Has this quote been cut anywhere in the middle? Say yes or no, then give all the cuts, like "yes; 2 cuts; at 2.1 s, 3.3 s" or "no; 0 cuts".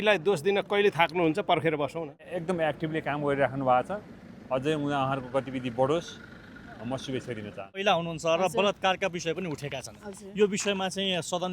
yes; 2 cuts; at 2.3 s, 7.8 s